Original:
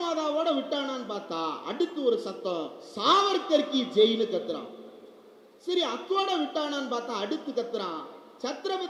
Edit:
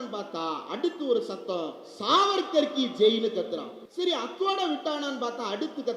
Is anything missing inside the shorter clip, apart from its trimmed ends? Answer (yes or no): yes